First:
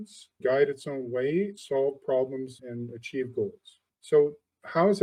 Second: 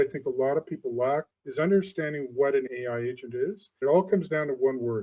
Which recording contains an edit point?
second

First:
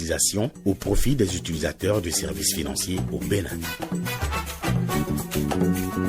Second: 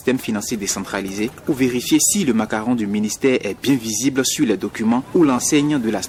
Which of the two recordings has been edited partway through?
first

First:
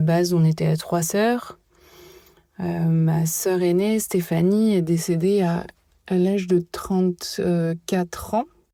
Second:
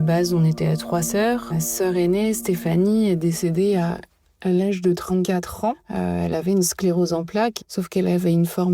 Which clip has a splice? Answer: second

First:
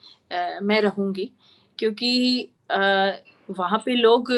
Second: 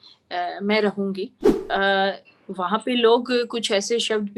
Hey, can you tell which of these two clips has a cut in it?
second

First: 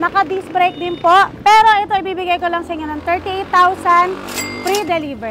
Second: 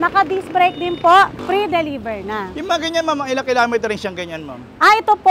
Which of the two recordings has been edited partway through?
second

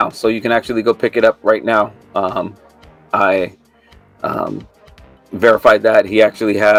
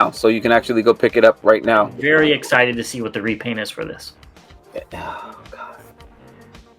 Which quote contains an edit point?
second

